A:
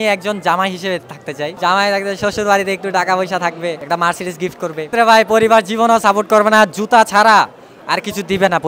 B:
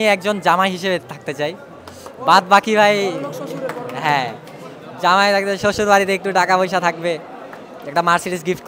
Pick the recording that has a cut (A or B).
A